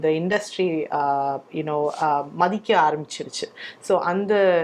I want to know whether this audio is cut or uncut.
uncut